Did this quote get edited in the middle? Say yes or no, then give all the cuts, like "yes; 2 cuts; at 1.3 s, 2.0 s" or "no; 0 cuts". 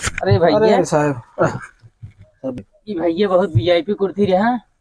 yes; 1 cut; at 2.6 s